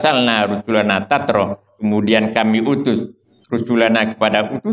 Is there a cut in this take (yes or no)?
no